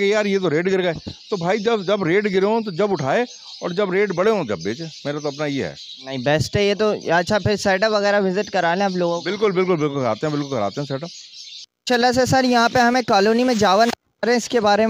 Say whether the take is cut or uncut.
uncut